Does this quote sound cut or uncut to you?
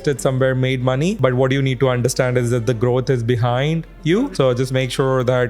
cut